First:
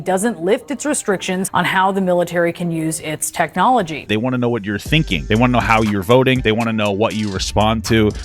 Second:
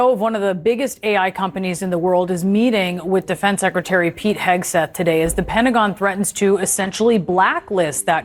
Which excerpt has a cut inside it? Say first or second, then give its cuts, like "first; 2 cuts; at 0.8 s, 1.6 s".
first; 4 cuts; at 1.5 s, 4.1 s, 5.2 s, 6.4 s